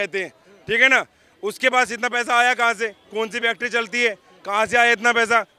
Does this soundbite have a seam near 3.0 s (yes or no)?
no